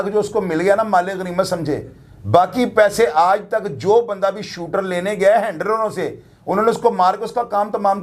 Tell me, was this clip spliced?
no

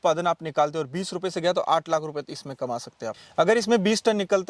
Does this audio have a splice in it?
yes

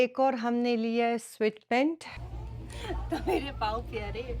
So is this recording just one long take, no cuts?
no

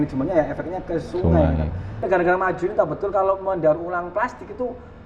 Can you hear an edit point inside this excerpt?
yes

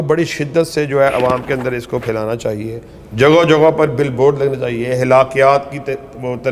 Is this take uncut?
yes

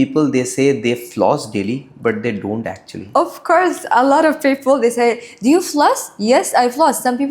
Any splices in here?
no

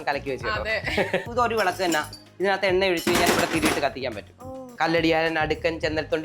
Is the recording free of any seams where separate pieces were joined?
no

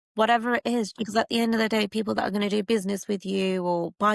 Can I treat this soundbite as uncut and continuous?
no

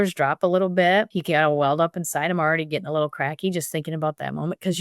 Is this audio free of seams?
no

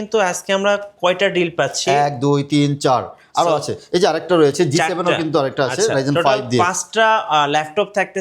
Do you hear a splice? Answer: no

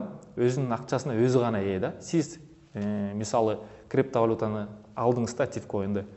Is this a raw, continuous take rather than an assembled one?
yes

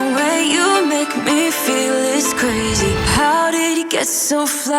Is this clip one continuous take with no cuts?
yes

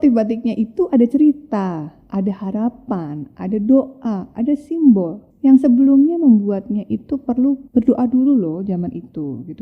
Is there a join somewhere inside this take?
yes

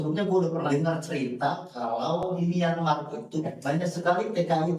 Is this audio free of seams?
yes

